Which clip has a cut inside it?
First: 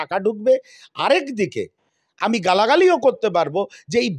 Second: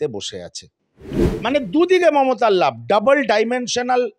second; 1 cut; at 1.2 s

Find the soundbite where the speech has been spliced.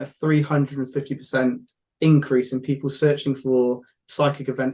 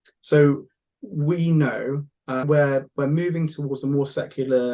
second; 1 cut; at 2.4 s

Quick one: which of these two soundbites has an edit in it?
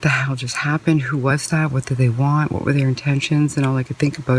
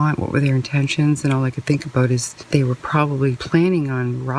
second; 1 cut; at 3.4 s

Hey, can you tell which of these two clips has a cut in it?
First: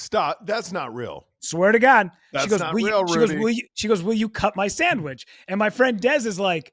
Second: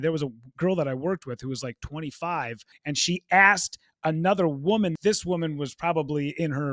second; 2 cuts; at 2.7 s, 4.9 s

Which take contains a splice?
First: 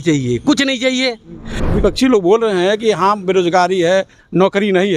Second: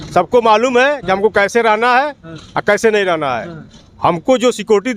first; 1 cut; at 1.6 s

